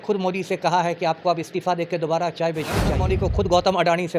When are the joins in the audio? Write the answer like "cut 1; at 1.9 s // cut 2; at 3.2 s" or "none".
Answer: cut 1; at 3.0 s